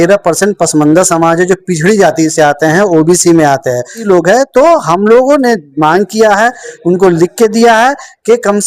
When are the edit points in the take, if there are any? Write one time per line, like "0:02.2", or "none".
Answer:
0:04.1